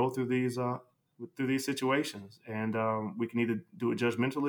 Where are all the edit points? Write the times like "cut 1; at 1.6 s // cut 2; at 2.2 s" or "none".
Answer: none